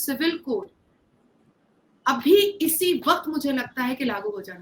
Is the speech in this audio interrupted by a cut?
no; 0 cuts

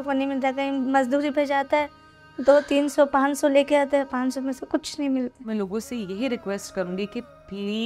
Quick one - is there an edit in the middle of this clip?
yes; 1 cut; at 5.5 s

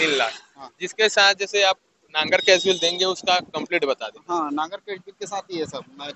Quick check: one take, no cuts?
yes; 0 cuts

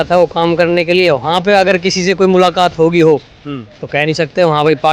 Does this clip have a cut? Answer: no; 0 cuts

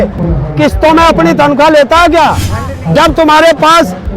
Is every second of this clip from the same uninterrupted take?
no; 1 cut; at 2.7 s

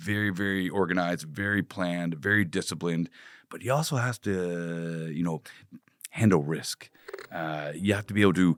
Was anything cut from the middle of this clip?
no; 0 cuts

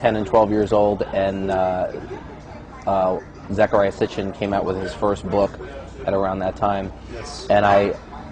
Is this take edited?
yes; 1 cut; at 2.1 s

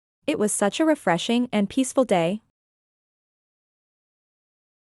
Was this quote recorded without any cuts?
yes; 0 cuts

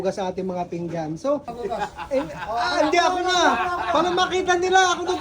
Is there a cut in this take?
yes; 1 cut; at 1.5 s

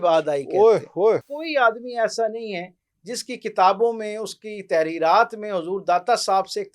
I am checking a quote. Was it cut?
yes; 1 cut; at 1.3 s

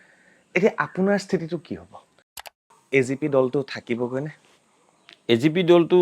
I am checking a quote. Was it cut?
yes; 1 cut; at 2.6 s

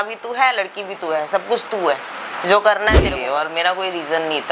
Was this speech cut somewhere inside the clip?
yes; 1 cut; at 3.2 s

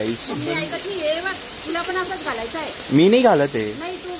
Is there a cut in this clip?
no; 0 cuts

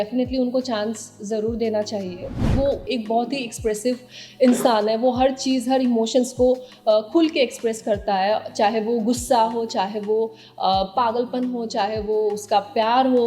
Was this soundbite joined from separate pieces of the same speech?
yes; 1 cut; at 2.5 s

